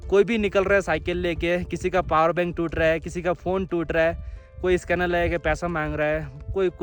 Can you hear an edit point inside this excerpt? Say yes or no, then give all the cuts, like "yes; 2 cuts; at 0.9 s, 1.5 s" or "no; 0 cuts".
no; 0 cuts